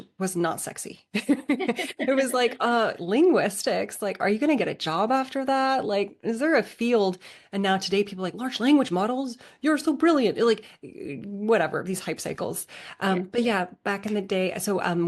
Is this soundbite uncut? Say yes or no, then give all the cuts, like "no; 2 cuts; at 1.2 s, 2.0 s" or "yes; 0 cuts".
yes; 0 cuts